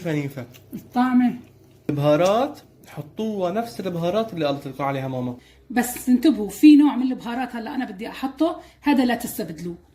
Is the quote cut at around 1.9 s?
yes; 2 cuts; at 1.9 s, 5.5 s

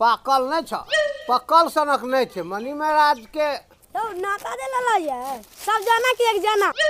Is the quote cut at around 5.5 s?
no; 1 cut; at 3.8 s

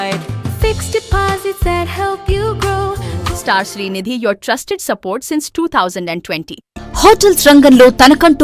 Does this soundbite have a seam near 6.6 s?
yes; 2 cuts; at 3.1 s, 6.6 s

